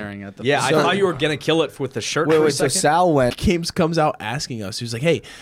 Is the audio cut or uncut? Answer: cut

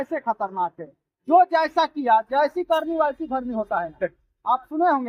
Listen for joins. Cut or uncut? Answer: uncut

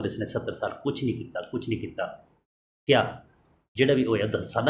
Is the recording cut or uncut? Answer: uncut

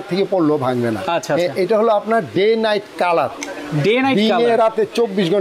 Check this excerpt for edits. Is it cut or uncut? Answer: uncut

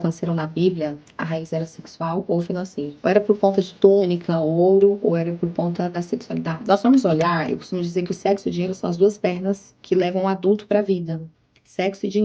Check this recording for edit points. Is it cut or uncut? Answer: cut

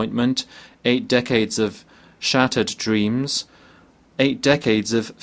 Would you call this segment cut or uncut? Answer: uncut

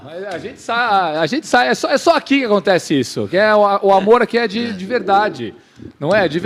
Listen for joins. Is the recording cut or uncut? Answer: uncut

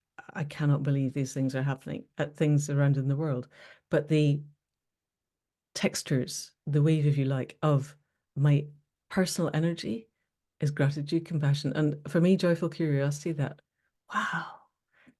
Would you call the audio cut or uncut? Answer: uncut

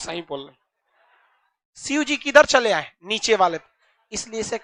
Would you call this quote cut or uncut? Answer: uncut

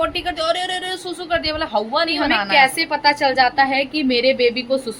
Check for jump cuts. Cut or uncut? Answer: cut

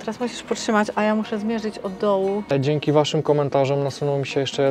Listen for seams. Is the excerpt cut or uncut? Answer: cut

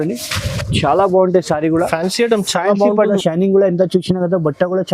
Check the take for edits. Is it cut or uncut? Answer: cut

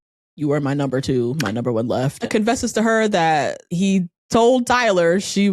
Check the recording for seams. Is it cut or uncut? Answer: cut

